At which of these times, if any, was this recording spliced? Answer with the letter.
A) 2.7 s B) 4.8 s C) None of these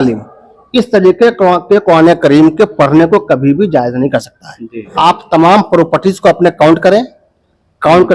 B